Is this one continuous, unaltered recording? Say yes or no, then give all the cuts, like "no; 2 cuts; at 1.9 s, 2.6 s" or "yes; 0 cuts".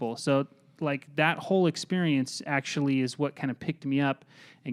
yes; 0 cuts